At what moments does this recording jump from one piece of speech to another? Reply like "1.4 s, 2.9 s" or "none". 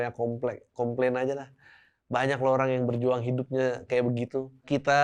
none